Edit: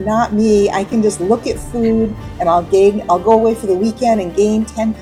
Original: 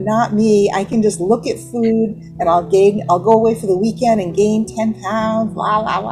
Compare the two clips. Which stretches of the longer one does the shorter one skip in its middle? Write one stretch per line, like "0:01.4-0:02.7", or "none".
none